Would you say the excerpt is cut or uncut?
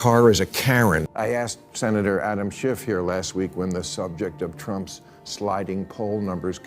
cut